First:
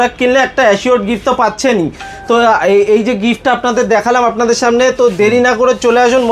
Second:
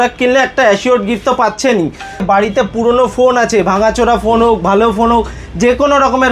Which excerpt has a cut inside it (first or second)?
second